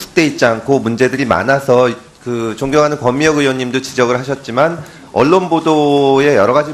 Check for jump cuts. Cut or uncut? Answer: uncut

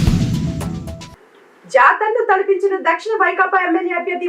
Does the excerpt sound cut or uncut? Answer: uncut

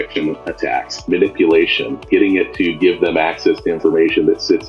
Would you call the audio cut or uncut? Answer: cut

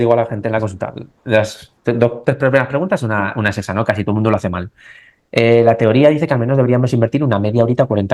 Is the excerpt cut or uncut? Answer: uncut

